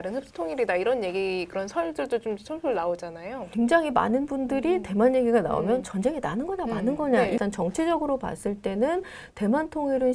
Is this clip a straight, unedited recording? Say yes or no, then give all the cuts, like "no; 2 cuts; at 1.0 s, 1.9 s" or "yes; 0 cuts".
no; 2 cuts; at 3.4 s, 7.4 s